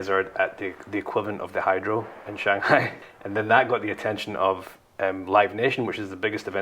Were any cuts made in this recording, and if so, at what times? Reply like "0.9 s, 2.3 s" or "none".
3.0 s